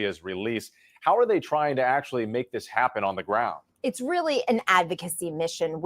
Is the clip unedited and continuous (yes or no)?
no